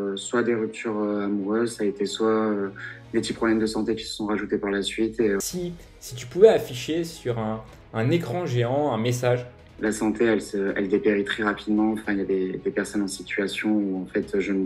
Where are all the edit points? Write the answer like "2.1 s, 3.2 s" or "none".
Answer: 5.4 s, 9.6 s